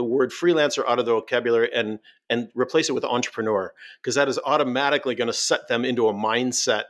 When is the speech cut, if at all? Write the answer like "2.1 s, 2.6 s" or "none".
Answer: none

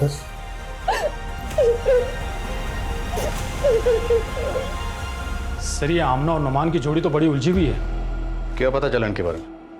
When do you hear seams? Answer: none

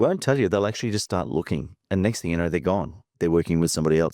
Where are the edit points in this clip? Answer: 3.2 s

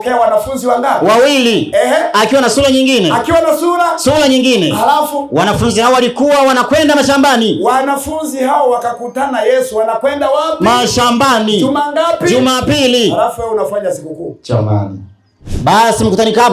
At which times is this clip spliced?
15.5 s

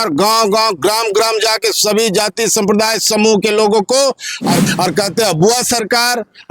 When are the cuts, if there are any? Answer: 4.7 s

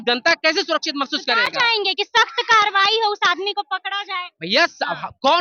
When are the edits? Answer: none

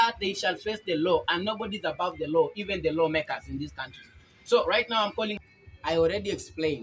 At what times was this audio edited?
5.4 s

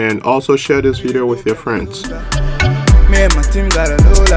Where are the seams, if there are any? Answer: 2.3 s

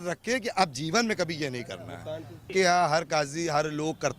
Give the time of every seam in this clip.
2.5 s

